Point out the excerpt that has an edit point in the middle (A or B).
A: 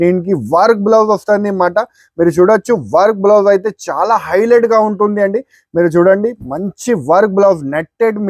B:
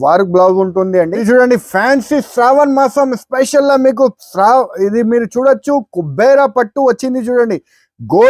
B